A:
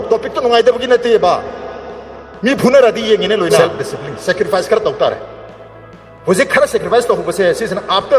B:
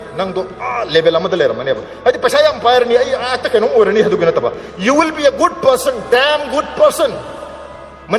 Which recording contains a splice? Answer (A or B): A